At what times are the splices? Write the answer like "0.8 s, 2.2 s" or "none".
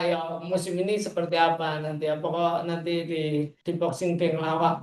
3.6 s